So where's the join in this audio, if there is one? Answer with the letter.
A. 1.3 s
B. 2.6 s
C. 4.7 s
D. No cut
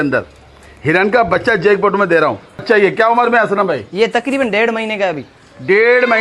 B